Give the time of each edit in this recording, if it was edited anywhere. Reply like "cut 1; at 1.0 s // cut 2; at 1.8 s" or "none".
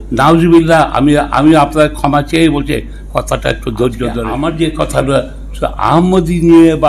cut 1; at 4.3 s